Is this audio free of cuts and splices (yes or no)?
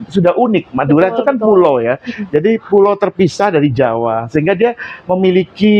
yes